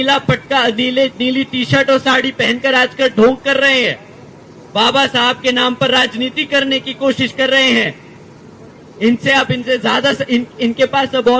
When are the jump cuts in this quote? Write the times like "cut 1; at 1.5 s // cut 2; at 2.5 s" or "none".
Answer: none